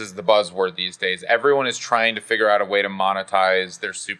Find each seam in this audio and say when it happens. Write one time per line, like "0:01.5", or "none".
none

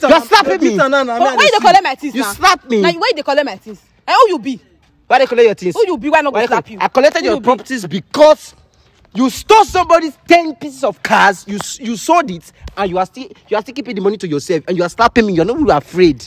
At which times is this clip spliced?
none

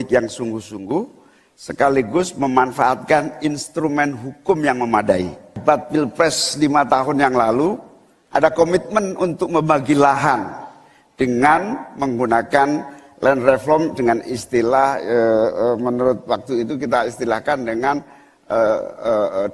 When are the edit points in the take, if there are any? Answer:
0:05.6

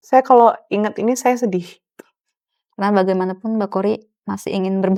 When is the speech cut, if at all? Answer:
none

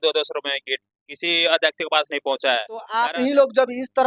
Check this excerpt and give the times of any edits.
0:02.8

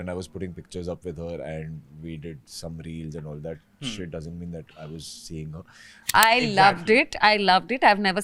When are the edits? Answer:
0:05.9

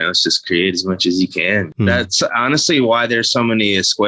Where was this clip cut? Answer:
0:01.7

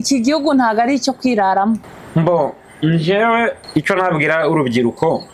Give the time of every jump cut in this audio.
0:01.8
0:03.6

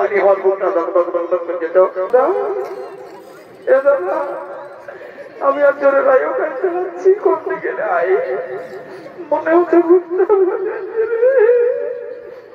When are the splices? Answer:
0:02.1

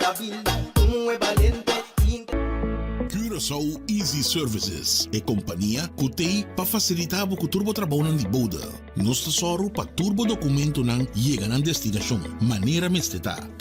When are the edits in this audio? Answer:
0:02.2

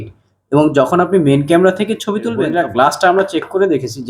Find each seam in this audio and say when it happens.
0:02.5

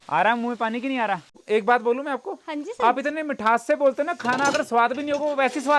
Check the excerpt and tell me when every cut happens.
0:01.3

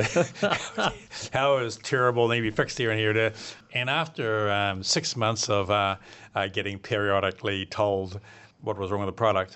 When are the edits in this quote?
0:03.5

